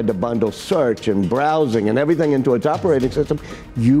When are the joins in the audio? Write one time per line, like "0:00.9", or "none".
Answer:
none